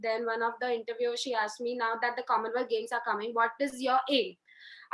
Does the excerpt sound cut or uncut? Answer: uncut